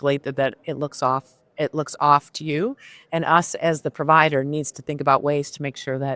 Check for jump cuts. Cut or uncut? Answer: uncut